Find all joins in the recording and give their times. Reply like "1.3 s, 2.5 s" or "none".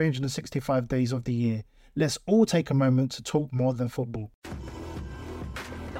4.3 s